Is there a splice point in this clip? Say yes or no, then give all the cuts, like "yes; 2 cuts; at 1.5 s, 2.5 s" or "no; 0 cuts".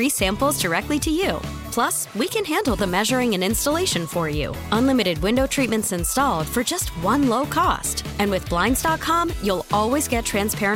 no; 0 cuts